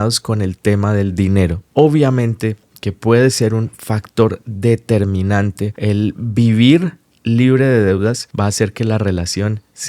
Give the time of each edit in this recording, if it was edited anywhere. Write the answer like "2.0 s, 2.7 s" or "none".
1.6 s, 5.7 s, 8.3 s